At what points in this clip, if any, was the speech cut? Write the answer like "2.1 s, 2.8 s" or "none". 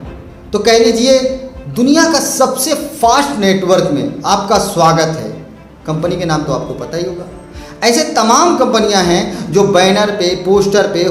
none